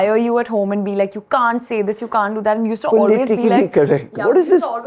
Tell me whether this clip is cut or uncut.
uncut